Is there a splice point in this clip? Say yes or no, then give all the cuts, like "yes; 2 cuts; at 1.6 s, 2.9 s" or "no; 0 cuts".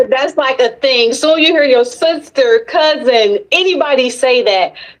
no; 0 cuts